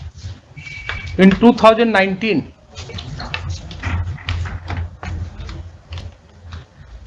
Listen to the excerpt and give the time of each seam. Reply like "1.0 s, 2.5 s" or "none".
none